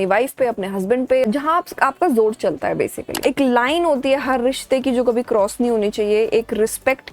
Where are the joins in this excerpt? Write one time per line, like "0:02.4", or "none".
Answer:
0:01.3
0:03.1